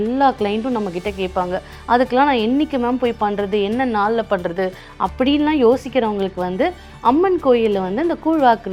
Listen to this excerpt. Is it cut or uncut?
uncut